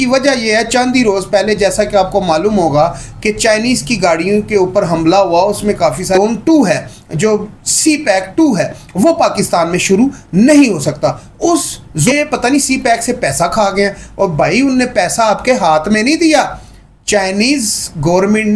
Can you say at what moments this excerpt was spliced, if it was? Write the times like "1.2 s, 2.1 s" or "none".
6.2 s, 12.1 s